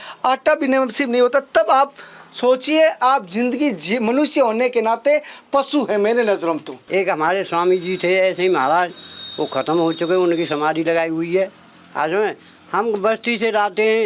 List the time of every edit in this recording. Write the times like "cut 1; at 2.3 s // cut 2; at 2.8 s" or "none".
cut 1; at 6.7 s